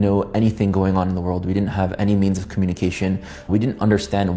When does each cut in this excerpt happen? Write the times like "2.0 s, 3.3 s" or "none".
none